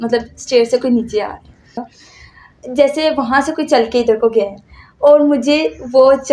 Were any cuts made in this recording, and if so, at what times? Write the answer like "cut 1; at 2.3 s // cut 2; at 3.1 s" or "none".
cut 1; at 1.9 s